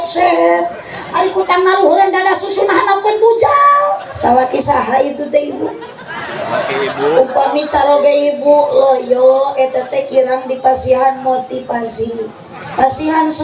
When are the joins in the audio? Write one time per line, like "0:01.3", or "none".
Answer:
0:04.1